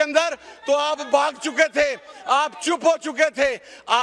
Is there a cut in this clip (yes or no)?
no